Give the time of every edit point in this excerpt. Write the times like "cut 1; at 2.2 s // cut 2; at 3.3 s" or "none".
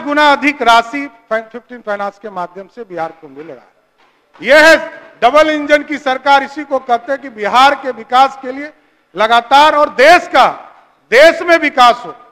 none